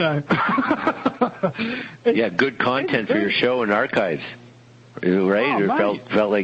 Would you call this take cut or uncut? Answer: cut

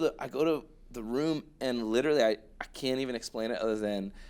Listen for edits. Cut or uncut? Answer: uncut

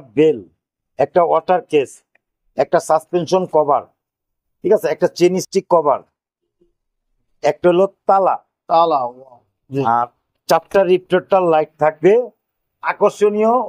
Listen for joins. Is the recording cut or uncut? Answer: uncut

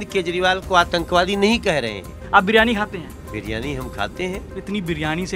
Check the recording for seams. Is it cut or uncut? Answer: cut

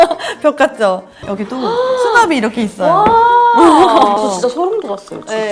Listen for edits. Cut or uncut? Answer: cut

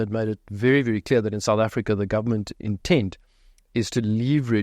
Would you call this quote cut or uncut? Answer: uncut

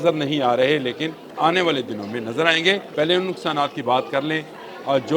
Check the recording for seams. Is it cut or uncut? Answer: cut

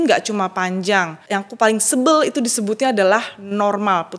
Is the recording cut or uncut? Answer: cut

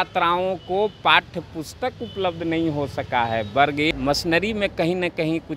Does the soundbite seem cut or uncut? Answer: cut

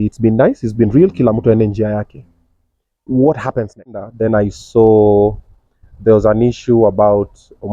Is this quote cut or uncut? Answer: cut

